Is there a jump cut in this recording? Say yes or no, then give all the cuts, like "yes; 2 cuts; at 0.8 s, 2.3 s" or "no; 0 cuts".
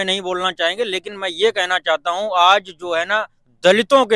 no; 0 cuts